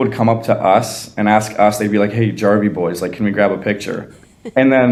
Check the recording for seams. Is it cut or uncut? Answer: uncut